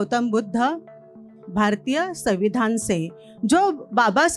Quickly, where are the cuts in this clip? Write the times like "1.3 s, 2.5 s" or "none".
1.2 s